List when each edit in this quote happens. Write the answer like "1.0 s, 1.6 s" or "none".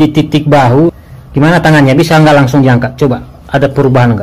1.0 s

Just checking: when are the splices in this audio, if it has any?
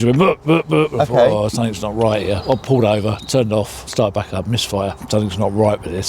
3.8 s, 5.0 s

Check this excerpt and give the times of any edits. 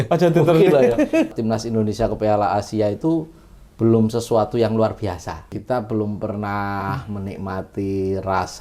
1.3 s, 5.5 s

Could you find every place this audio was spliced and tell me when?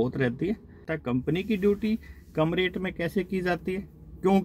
0.9 s

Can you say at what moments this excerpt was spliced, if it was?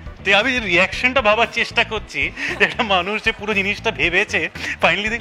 none

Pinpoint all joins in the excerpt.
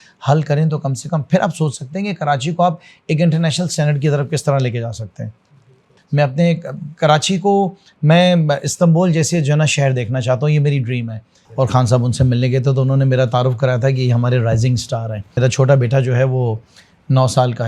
5.9 s, 11.4 s, 15.4 s

